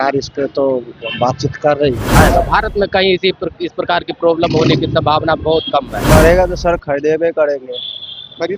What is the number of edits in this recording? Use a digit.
2